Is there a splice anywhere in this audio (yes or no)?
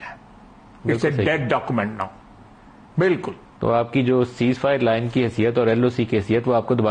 no